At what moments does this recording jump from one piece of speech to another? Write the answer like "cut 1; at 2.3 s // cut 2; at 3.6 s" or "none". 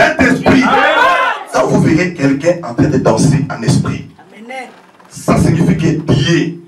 cut 1; at 1.4 s